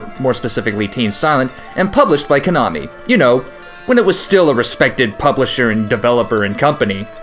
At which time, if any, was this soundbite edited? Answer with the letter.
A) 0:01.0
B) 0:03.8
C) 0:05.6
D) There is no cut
B